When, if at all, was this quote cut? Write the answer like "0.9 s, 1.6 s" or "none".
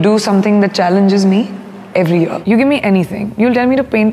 2.4 s